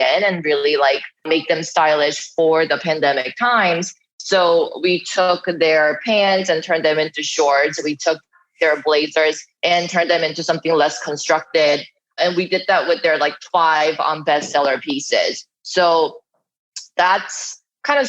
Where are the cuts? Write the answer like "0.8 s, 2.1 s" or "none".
1.2 s, 12.1 s